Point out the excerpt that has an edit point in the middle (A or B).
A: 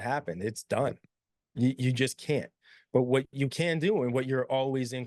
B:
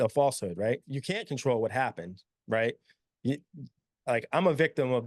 B